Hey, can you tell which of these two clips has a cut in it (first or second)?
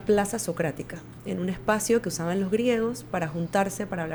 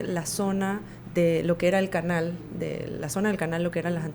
second